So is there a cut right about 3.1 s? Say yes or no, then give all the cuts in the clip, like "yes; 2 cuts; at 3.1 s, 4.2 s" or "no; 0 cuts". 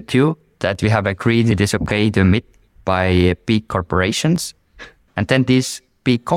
no; 2 cuts; at 1.5 s, 4.9 s